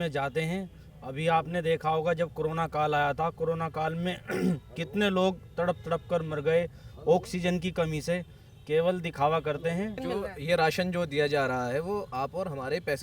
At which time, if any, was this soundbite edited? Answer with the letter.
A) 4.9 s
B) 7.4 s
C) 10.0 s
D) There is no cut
C